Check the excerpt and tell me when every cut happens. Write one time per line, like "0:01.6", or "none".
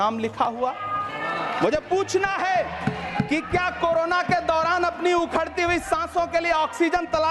none

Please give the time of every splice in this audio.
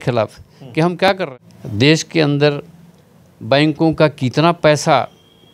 0:01.2

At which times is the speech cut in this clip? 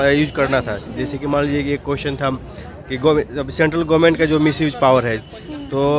none

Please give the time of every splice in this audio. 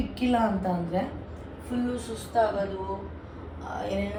none

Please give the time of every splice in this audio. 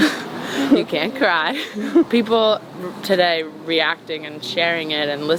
0:02.1

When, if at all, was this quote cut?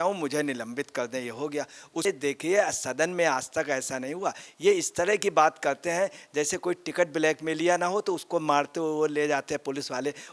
0:02.0

